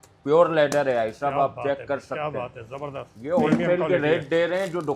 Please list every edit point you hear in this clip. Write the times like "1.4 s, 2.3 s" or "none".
3.1 s